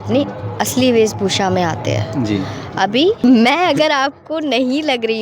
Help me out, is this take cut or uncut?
cut